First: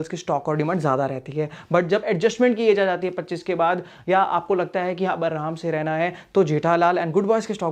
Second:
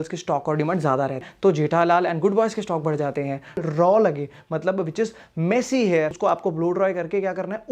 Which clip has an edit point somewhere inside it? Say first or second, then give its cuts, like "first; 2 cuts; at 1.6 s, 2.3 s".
second; 3 cuts; at 1.3 s, 3.6 s, 6.1 s